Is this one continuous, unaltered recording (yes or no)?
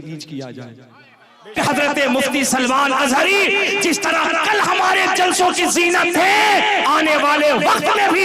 no